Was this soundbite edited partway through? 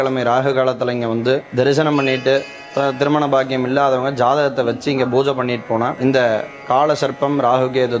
yes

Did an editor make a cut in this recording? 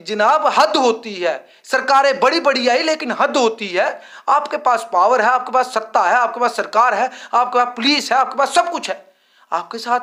no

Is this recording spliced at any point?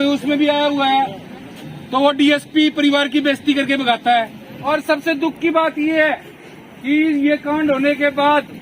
yes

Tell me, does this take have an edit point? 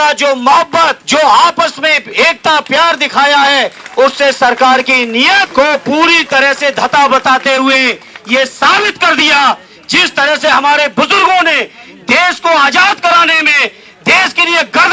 yes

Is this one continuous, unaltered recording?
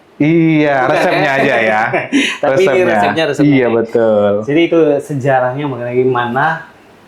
yes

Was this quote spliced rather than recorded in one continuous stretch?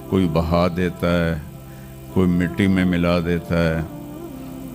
no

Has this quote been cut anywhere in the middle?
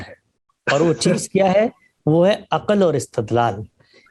no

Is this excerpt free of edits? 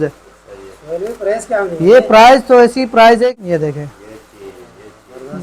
no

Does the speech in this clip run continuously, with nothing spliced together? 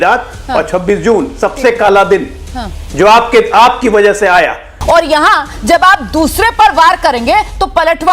no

